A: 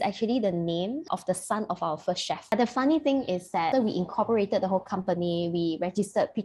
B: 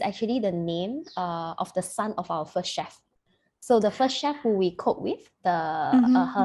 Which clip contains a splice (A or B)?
A